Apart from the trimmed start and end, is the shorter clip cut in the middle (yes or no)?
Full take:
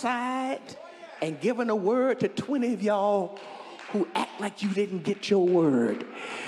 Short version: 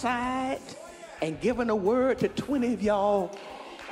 no